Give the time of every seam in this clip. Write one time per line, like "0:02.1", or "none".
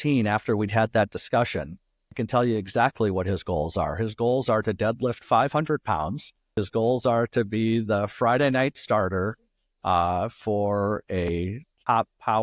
0:02.2
0:06.6
0:11.3